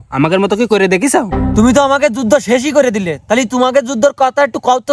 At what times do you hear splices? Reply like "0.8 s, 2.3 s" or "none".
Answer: 1.4 s